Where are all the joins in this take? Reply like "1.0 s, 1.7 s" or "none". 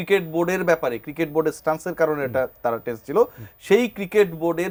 none